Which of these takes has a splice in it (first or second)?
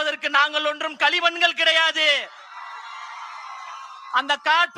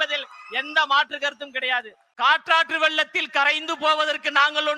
second